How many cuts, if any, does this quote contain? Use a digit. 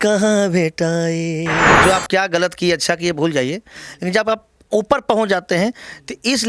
1